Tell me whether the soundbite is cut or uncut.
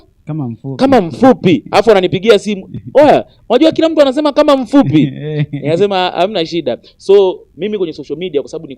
uncut